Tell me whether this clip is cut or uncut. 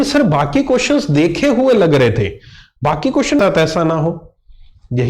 cut